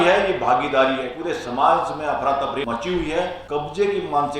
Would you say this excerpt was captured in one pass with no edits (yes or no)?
no